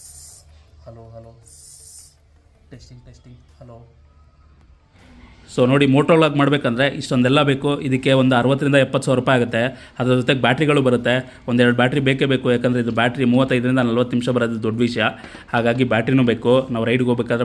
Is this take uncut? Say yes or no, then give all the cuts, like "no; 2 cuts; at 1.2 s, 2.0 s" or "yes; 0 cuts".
no; 1 cut; at 5.0 s